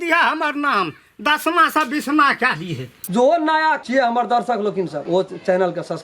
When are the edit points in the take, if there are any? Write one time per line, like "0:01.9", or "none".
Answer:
0:03.0
0:03.8
0:05.0